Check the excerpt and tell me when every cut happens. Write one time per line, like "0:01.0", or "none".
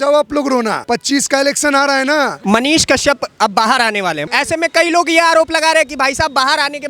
0:00.8
0:02.4
0:04.2